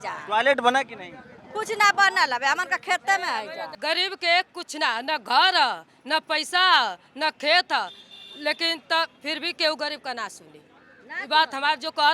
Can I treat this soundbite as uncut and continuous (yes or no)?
no